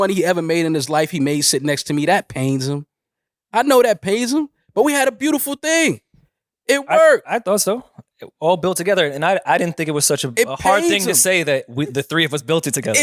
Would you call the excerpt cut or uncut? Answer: uncut